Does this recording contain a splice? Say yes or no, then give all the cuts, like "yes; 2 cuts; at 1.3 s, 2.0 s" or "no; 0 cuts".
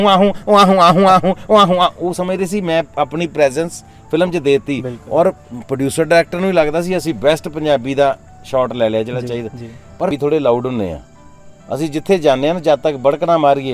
yes; 1 cut; at 10.1 s